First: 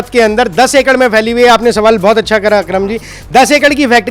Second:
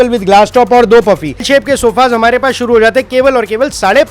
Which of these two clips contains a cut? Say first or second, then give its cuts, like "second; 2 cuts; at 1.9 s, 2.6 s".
second; 1 cut; at 1.5 s